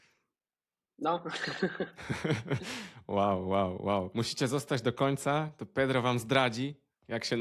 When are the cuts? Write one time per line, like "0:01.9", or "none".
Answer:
0:04.1